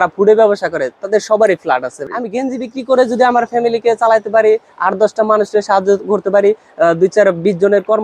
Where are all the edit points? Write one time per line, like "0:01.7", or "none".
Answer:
0:02.1